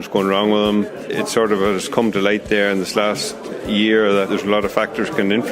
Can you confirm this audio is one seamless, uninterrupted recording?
no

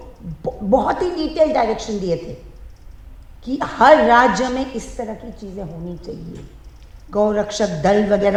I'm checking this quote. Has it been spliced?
no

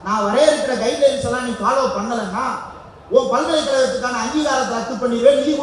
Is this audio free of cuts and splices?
yes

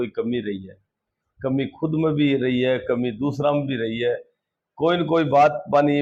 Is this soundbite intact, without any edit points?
yes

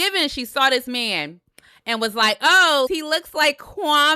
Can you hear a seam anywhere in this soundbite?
yes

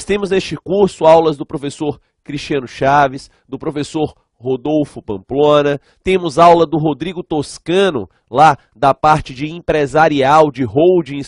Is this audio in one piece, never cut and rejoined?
no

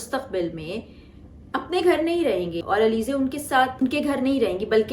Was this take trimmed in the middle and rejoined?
yes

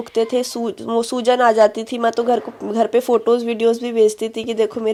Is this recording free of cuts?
yes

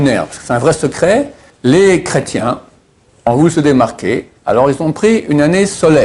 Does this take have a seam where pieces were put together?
yes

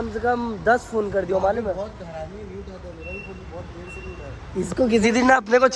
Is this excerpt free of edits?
yes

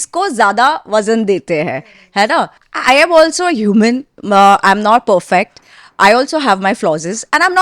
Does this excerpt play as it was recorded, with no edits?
no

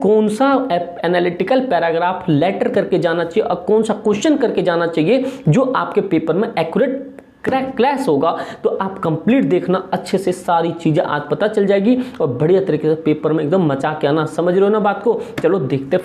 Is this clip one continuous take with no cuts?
yes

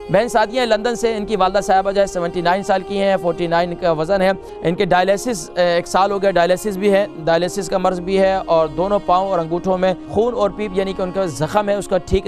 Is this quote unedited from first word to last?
no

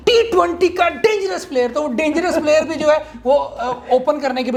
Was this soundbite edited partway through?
no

